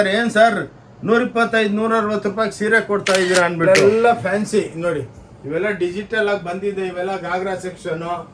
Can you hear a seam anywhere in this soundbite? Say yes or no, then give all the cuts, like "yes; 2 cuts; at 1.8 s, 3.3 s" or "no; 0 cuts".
yes; 1 cut; at 3.8 s